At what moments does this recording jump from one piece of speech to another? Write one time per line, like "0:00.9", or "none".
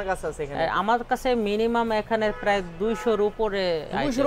none